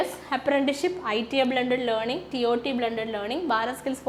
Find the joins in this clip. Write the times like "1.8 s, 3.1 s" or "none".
none

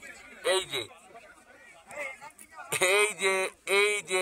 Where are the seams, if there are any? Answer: none

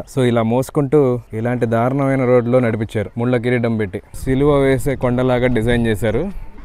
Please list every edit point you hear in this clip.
1.3 s, 3.1 s, 4.1 s

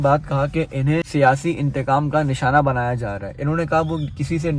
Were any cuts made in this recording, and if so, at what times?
1.1 s

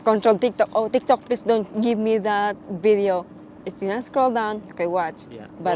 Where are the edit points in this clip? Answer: none

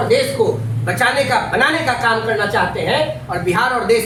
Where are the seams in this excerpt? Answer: none

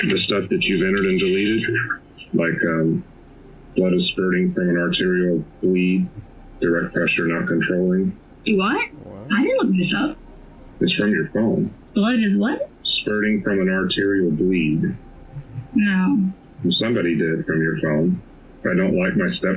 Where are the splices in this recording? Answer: none

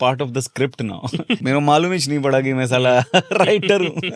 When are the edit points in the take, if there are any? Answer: 1.4 s

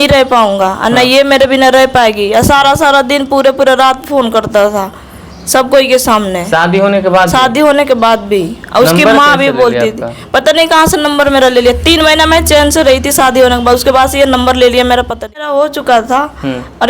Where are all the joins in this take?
15.4 s

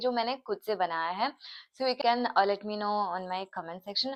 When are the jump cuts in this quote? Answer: none

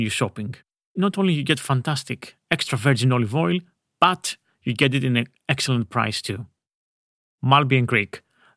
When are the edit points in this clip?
0.9 s

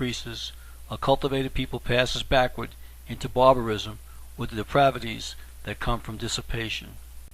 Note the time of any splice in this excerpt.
1.1 s

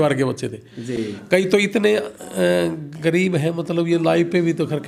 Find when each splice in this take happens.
none

